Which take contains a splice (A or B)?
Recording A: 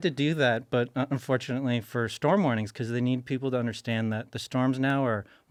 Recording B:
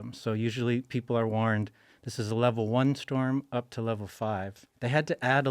B